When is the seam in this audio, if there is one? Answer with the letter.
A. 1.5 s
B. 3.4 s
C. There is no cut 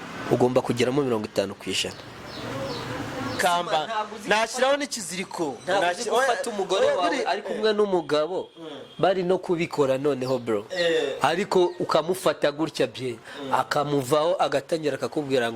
B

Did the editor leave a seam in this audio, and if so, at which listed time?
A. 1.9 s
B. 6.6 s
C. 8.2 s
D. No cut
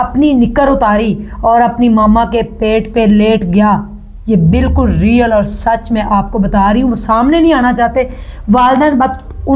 D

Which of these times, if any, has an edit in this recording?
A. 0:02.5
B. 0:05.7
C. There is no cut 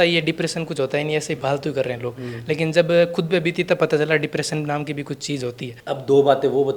B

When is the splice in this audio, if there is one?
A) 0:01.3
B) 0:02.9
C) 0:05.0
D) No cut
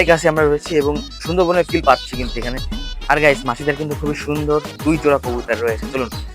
B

